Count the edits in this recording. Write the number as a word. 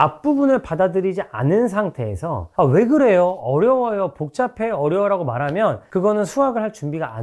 zero